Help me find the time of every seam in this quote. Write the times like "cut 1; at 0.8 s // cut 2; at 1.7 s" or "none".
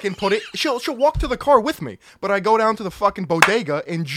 none